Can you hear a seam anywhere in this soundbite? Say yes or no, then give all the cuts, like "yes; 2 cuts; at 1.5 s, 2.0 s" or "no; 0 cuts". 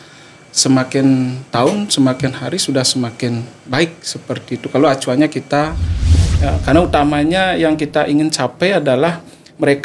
yes; 1 cut; at 6.0 s